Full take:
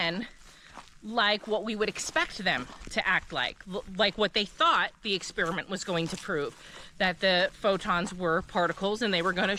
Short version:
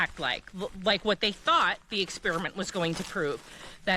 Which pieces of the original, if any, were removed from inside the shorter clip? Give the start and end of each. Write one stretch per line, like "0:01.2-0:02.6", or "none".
none